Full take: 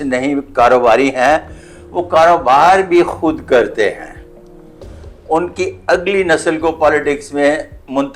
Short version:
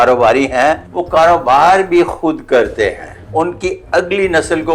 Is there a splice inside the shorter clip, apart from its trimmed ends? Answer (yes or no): yes